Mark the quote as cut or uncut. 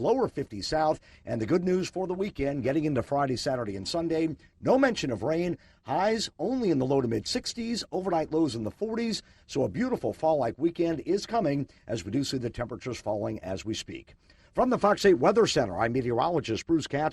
uncut